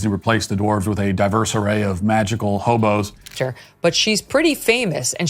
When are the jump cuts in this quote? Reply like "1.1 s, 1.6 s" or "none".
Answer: 3.2 s

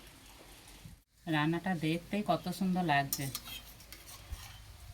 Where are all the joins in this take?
1.1 s

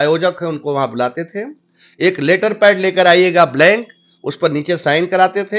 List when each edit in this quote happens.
none

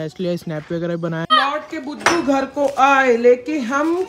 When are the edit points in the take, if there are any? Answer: 1.3 s

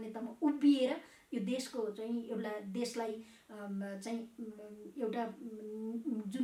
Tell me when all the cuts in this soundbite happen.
none

